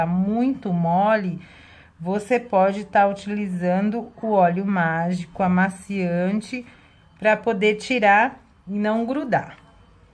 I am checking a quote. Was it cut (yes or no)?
yes